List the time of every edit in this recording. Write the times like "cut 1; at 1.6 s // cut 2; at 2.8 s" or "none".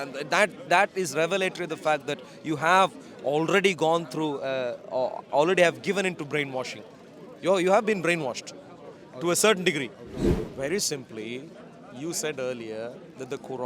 cut 1; at 10.4 s